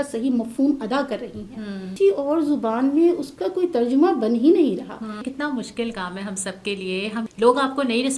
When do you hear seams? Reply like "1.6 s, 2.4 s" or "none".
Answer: 1.9 s, 5.3 s, 7.3 s